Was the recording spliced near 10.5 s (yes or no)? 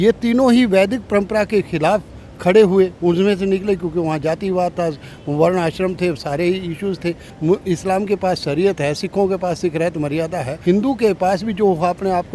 yes